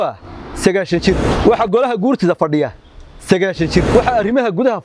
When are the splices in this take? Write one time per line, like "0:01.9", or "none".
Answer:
0:01.3
0:03.9